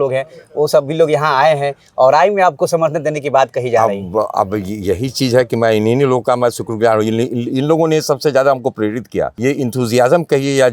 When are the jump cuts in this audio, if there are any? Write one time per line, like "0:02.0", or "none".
0:09.3